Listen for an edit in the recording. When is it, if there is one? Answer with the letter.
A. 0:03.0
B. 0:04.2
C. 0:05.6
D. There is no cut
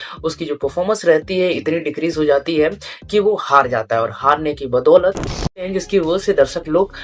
C